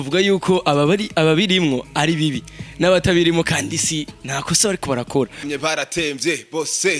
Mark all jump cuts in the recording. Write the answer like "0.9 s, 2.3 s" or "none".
5.4 s